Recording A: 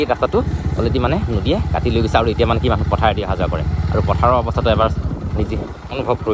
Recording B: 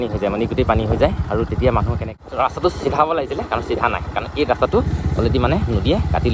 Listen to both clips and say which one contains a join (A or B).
B